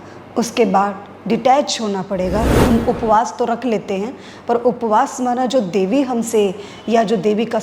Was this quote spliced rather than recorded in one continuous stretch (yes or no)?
yes